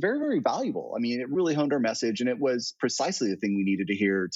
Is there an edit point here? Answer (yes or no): no